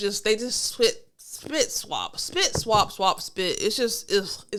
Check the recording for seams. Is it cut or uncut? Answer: uncut